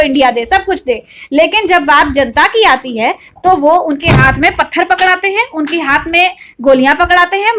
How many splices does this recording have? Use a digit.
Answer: 0